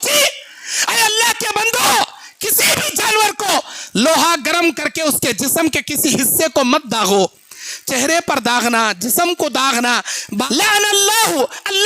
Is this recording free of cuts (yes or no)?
no